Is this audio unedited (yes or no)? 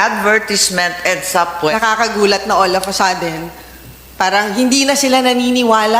no